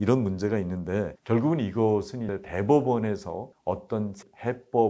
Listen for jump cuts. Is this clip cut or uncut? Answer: uncut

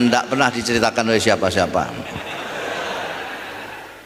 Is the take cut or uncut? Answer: uncut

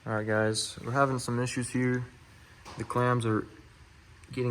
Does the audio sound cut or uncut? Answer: uncut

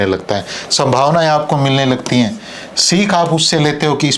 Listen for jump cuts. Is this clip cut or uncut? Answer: uncut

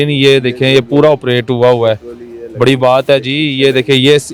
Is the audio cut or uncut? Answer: uncut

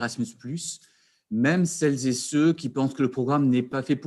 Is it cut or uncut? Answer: uncut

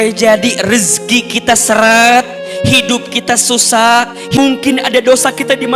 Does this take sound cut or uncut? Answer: cut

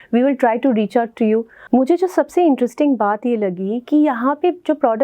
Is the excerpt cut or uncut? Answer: cut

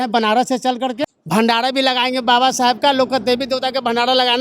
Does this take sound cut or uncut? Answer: cut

